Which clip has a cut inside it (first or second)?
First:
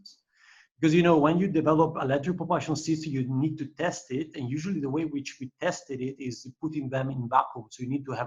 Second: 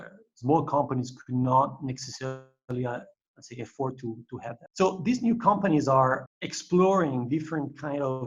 second